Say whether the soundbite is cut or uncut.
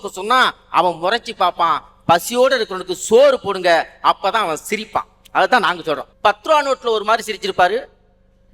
cut